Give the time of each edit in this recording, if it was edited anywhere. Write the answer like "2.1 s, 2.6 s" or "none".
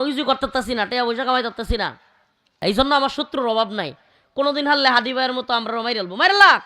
2.6 s